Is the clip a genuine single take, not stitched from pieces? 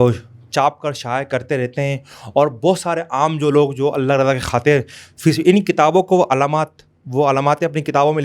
yes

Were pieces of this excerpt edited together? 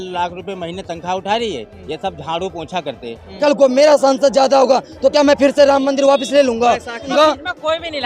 yes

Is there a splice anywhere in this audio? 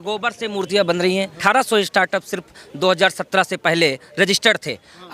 yes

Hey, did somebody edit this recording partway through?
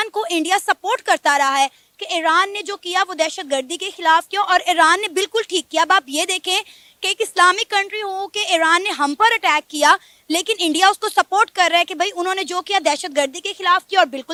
no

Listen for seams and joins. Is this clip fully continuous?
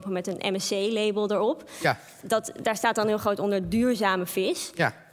yes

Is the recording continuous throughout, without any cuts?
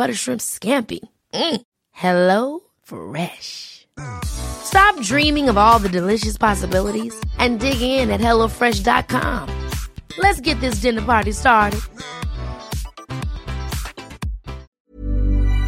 no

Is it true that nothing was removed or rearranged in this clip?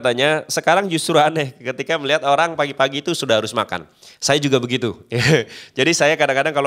yes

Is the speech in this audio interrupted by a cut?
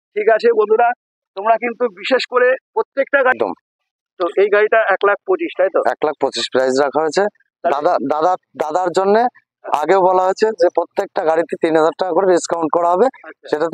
yes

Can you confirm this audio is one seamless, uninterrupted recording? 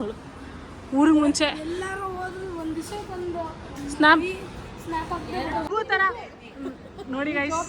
no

